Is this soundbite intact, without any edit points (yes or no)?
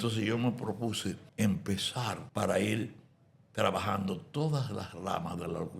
no